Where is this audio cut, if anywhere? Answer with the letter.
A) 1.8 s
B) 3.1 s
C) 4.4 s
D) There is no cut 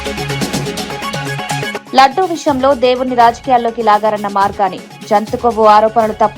A